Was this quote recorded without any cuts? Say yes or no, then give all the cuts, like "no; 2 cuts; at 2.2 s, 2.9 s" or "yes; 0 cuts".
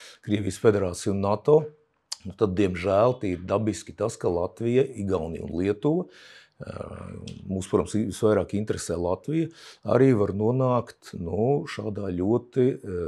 yes; 0 cuts